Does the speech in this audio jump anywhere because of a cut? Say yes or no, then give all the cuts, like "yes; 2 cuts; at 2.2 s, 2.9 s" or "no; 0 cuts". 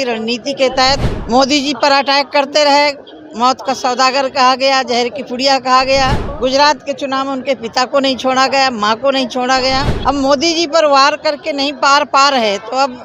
yes; 3 cuts; at 1.1 s, 6.3 s, 9.9 s